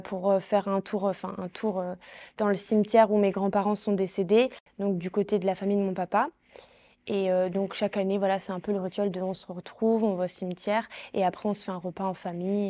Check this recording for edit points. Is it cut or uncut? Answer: uncut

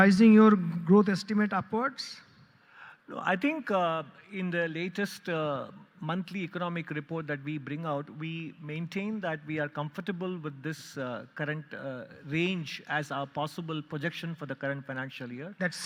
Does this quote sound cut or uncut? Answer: uncut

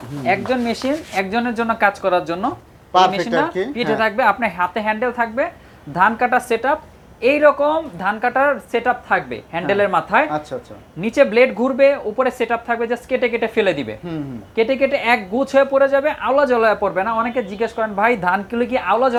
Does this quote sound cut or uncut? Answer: uncut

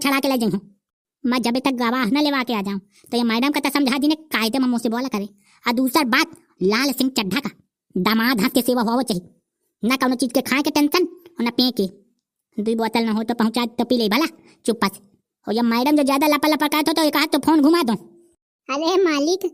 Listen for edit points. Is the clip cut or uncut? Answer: uncut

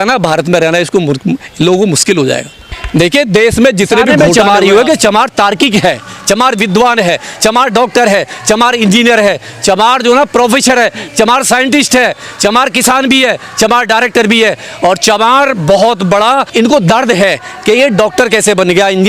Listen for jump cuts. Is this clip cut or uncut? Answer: cut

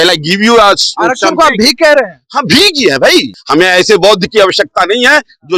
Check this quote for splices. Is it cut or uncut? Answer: cut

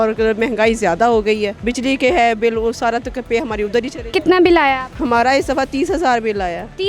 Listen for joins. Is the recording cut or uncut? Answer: cut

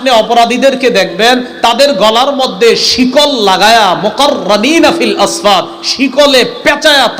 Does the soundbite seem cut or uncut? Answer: uncut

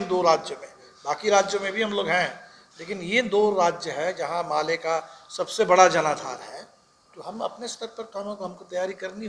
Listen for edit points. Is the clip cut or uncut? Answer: uncut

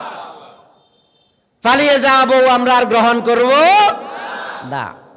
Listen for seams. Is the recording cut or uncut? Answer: uncut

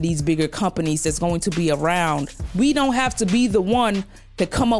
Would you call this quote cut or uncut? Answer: cut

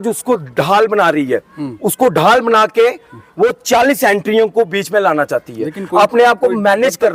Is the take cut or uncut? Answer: uncut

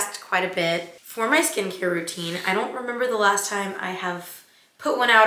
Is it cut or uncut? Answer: uncut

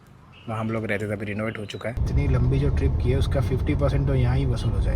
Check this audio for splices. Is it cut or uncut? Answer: cut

